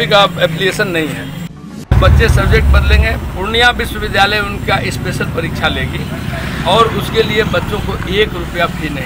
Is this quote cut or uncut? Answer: cut